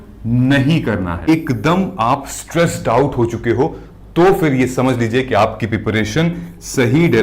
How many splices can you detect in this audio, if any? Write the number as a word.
one